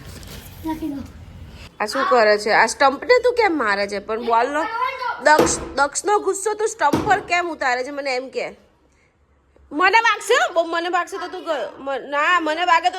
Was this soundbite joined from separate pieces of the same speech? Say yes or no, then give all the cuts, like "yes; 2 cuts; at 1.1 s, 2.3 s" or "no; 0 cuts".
yes; 1 cut; at 1.6 s